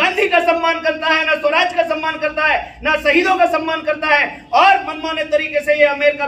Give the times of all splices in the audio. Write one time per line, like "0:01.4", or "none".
none